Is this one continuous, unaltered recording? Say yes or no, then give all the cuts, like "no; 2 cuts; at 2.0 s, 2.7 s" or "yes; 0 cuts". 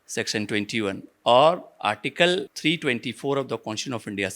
no; 1 cut; at 2.5 s